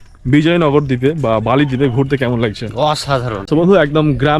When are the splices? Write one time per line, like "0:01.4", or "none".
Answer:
0:03.5

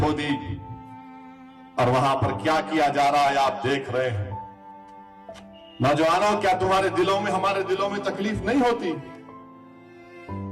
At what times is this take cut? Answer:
0:04.2

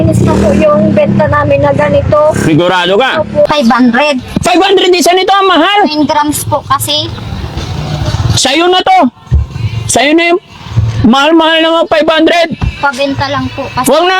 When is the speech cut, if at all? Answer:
0:03.5

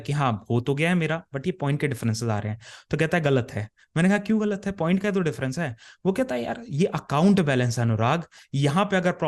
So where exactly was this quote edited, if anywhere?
none

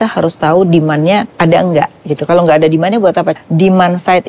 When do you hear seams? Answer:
0:01.3
0:03.4

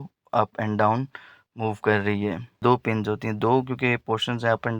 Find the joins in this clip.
0:02.6

